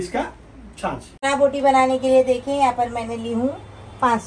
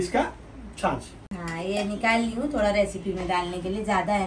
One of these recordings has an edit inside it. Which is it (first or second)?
first